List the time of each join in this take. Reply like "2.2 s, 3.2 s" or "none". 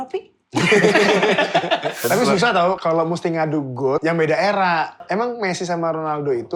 2.0 s, 2.8 s, 4.0 s, 5.0 s